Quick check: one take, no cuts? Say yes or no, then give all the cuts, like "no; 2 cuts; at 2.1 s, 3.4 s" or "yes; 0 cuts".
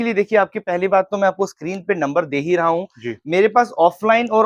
yes; 0 cuts